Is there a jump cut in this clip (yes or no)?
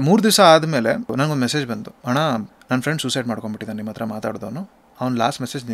yes